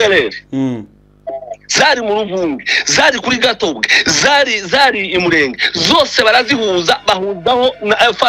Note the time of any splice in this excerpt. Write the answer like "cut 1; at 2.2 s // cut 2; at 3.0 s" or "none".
none